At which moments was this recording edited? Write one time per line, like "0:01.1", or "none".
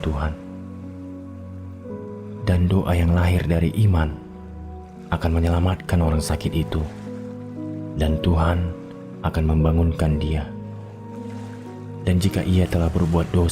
0:10.4
0:11.7